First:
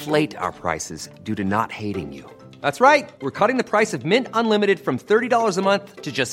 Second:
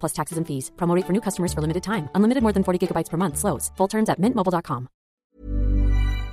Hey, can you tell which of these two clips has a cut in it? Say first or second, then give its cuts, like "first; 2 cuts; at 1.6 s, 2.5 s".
second; 1 cut; at 5.4 s